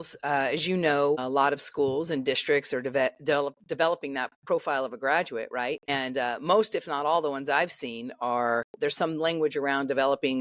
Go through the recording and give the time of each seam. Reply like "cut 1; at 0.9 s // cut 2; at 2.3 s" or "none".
cut 1; at 1.2 s // cut 2; at 5.8 s // cut 3; at 8.7 s